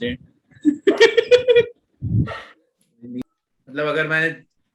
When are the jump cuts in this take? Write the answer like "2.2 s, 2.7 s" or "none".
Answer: 3.2 s